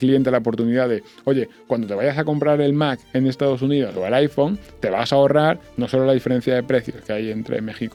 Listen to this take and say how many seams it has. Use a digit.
0